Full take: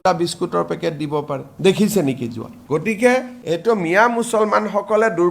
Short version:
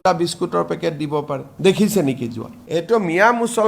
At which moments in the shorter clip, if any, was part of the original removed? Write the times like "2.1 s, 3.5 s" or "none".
2.6 s